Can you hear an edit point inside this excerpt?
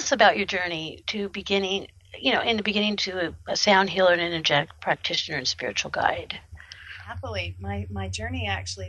yes; 1 cut; at 4.8 s

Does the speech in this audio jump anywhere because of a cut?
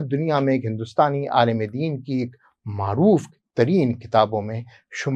no; 0 cuts

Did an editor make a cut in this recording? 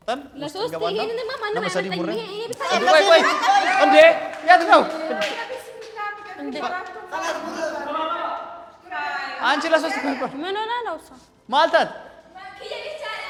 no; 0 cuts

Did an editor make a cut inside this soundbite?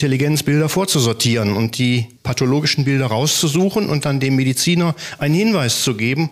no; 0 cuts

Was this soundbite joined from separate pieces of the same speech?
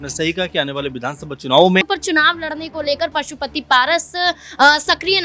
yes; 1 cut; at 1.9 s

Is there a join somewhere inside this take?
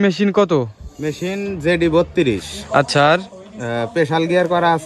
no; 0 cuts

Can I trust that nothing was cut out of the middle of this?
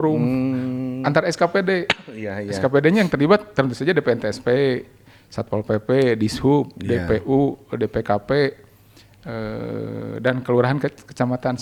yes; 0 cuts

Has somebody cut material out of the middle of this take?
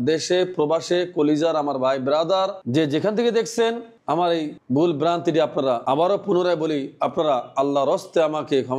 no; 0 cuts

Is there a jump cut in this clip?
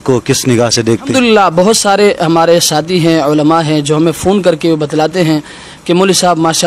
yes; 1 cut; at 1.1 s

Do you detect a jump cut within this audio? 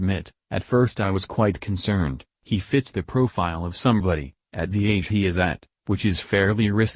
yes; 1 cut; at 2.3 s

